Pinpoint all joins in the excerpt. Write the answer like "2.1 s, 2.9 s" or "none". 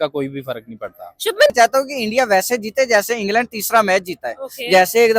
1.5 s